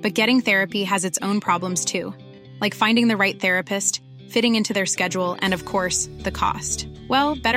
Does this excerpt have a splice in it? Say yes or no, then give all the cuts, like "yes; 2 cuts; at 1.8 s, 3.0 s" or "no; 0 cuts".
no; 0 cuts